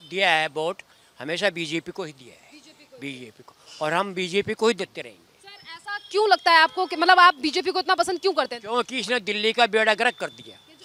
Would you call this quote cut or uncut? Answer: uncut